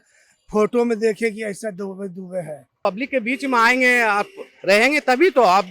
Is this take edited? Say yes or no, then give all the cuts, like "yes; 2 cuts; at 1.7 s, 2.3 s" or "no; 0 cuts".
yes; 1 cut; at 2.8 s